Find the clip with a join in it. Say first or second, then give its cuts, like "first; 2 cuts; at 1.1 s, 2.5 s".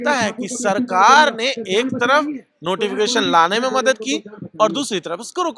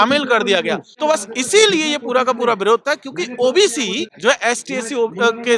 second; 2 cuts; at 0.9 s, 4.1 s